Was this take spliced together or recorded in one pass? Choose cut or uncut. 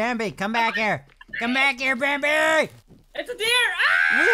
cut